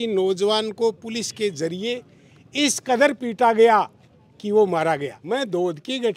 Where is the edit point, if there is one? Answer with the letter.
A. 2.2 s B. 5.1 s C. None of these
B